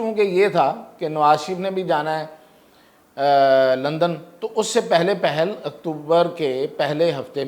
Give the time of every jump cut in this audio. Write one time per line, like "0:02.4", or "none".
none

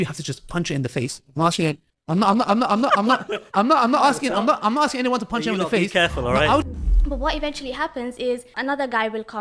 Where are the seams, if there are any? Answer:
0:01.9
0:06.6
0:08.5

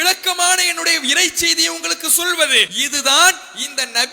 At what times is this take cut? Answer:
0:02.8

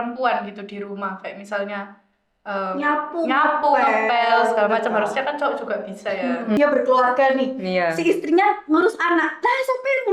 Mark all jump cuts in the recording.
0:06.6

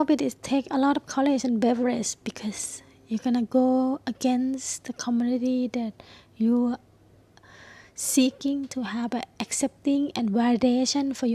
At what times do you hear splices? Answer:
none

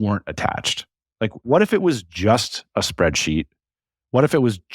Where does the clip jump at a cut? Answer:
0:01.4

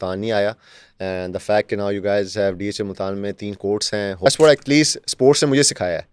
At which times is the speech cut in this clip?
0:04.3

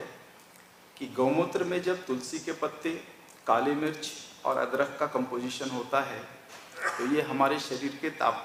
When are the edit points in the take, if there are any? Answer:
none

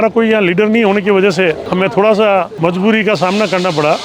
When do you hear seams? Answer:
0:01.6
0:02.5

